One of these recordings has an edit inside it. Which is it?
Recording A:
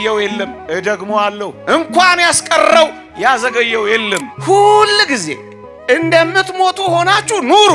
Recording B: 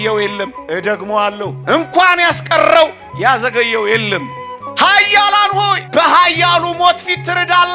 A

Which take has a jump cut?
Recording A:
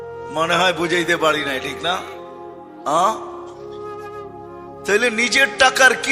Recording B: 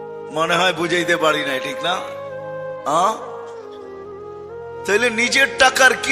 B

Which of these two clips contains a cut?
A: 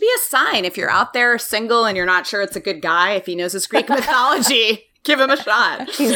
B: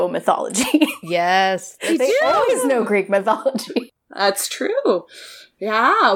B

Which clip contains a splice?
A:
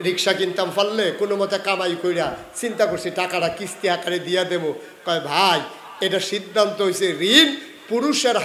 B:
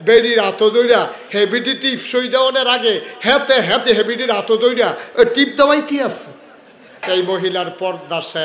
B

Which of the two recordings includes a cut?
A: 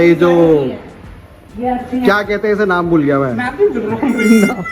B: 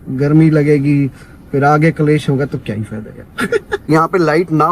B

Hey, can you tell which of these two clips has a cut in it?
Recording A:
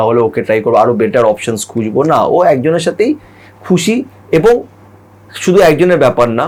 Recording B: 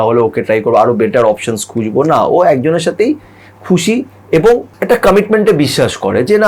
B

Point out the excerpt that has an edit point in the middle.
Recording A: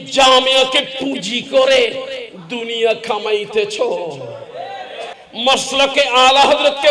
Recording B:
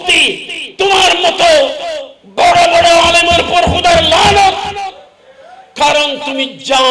A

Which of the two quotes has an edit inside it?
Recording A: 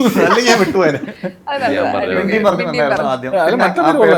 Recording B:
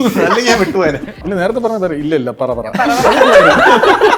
B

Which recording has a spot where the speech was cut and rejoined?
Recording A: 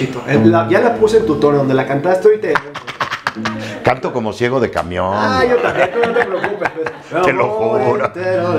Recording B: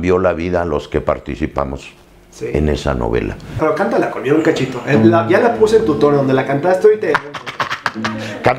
B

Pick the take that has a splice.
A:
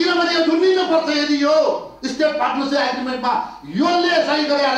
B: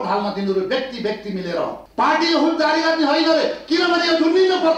B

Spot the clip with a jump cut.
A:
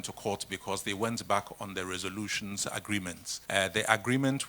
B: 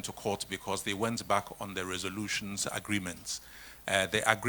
A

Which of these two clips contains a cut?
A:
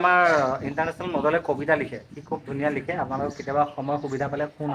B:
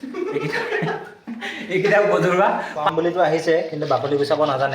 B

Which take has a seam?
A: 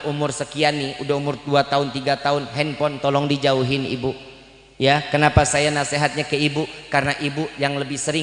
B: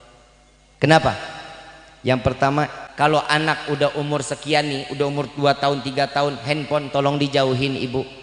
B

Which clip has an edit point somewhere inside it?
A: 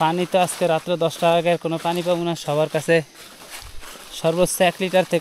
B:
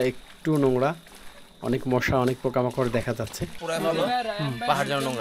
B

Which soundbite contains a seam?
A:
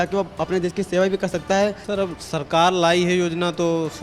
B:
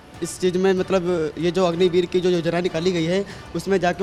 A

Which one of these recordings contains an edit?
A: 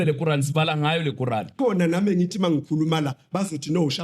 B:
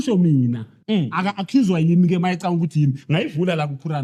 A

